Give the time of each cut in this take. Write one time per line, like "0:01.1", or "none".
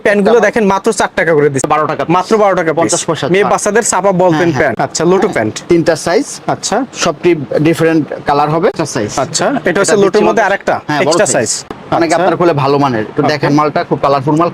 0:01.7
0:04.7
0:08.7
0:11.8